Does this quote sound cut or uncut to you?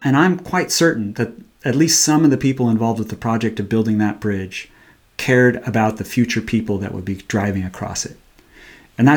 uncut